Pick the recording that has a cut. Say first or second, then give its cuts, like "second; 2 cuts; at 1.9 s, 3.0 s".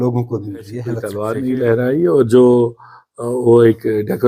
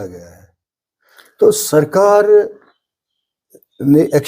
first; 1 cut; at 1.1 s